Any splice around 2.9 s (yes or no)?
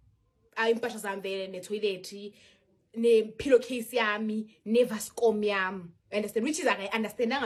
no